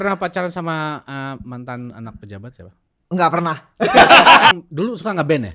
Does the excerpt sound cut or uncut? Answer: cut